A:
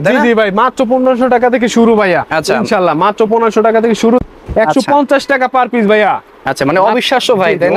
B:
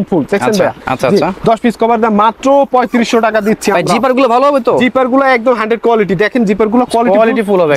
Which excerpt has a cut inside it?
A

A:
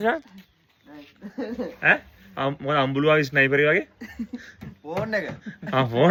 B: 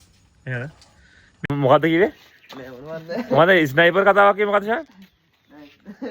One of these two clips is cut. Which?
B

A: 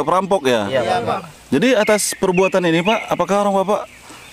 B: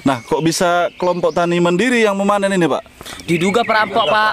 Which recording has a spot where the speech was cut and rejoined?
A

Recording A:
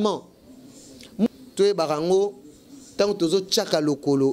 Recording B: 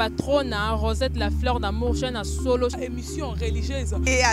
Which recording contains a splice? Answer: A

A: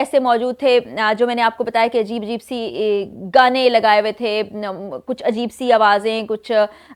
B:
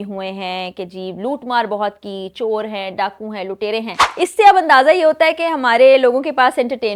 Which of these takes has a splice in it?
B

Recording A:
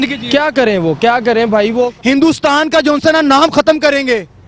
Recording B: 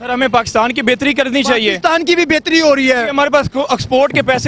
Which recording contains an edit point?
A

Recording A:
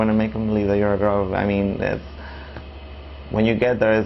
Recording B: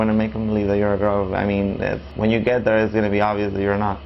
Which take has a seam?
B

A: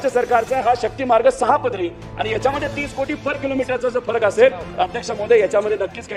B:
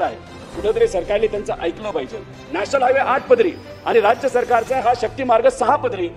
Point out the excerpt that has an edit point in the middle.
B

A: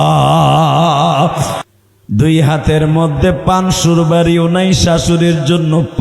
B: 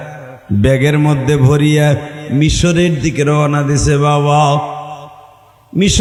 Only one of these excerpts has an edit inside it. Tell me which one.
A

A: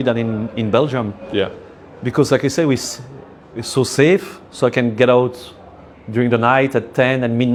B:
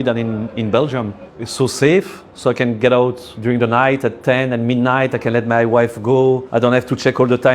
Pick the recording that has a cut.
B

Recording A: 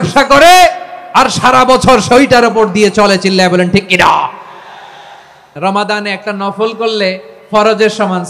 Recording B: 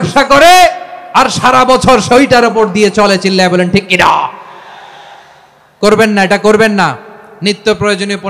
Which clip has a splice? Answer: A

